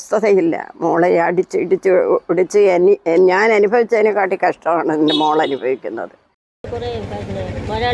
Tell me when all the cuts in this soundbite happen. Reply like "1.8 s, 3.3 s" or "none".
6.6 s